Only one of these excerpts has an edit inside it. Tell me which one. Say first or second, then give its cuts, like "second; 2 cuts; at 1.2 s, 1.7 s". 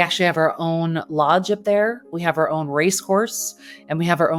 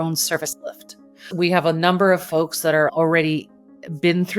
second; 1 cut; at 1.0 s